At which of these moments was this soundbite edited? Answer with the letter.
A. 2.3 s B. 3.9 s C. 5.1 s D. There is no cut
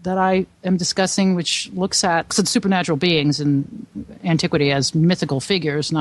A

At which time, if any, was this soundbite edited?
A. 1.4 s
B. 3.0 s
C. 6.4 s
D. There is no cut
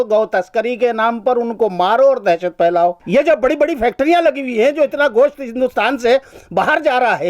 B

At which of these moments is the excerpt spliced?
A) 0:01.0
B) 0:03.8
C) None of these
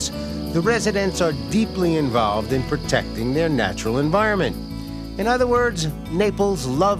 B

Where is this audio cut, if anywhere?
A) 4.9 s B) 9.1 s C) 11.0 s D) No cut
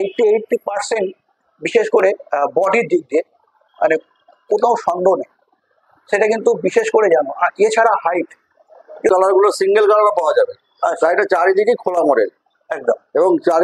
B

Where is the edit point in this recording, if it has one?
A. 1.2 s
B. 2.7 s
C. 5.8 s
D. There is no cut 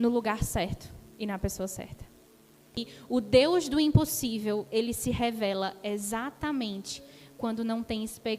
B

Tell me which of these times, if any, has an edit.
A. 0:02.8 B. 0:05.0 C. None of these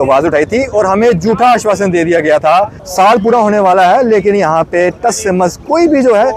A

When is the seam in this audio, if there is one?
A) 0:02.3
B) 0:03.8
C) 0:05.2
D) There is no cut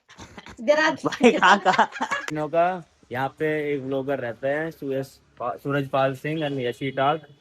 A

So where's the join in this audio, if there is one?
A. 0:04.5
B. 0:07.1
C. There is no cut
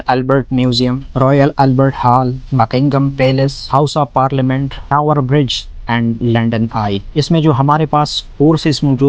B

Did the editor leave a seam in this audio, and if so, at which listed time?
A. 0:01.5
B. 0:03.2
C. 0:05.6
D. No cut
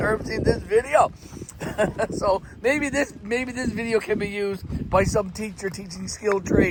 D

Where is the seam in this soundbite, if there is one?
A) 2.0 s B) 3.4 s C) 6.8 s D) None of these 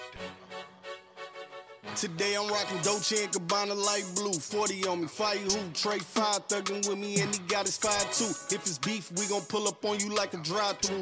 A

